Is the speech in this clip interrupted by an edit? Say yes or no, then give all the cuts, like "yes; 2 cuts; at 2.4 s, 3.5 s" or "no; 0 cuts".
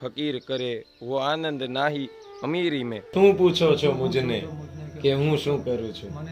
yes; 1 cut; at 3.1 s